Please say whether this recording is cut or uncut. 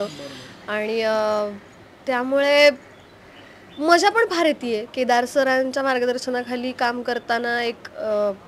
uncut